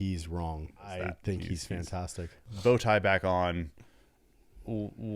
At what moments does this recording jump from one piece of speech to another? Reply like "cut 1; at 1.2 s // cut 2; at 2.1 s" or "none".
cut 1; at 1.0 s

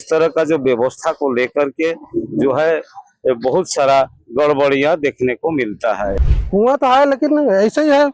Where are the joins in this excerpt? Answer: cut 1; at 6.2 s

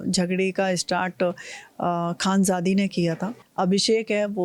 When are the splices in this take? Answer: cut 1; at 3.4 s

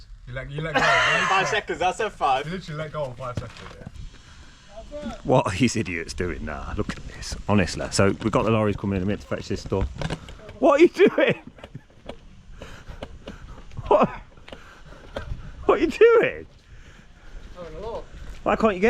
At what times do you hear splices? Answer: cut 1; at 4.0 s

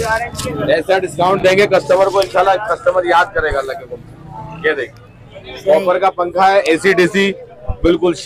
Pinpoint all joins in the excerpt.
none

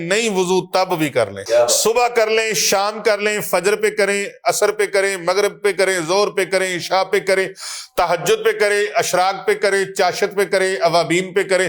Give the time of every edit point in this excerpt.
cut 1; at 1.4 s

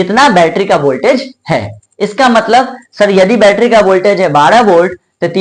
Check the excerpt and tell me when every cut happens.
none

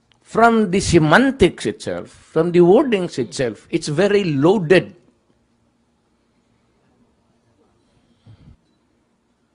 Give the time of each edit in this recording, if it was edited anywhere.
none

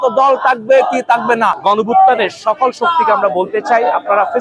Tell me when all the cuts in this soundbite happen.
cut 1; at 1.6 s

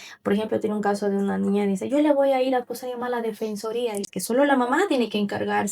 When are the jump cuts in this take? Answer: cut 1; at 4.1 s

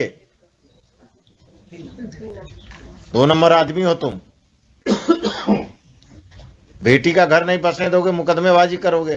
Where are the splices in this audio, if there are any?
none

